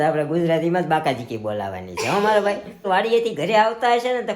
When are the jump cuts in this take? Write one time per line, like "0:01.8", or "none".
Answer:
0:02.9